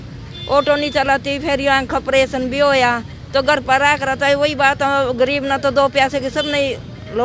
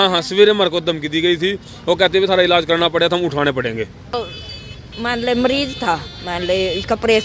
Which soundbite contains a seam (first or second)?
second